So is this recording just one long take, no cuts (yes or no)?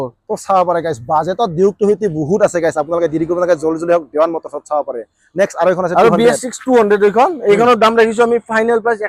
yes